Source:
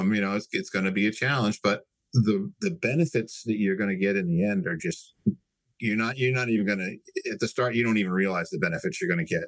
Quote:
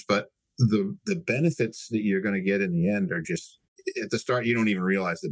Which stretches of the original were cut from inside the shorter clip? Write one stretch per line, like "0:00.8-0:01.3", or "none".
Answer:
0:05.2-0:06.9